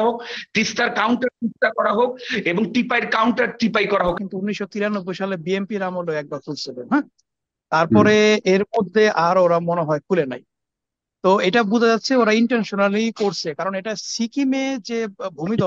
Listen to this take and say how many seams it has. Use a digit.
1